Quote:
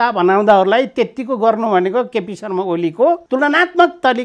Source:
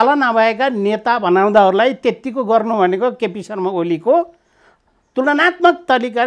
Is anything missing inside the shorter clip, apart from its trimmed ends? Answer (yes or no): yes